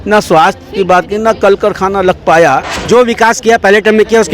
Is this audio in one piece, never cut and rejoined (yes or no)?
no